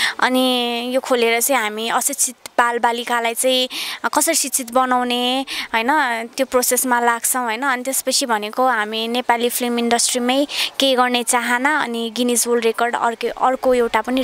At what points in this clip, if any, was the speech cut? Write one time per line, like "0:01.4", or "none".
none